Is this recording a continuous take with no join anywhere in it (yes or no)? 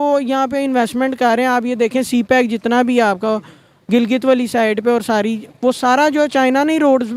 yes